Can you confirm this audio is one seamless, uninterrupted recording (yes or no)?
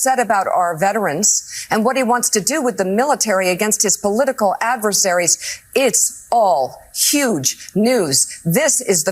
yes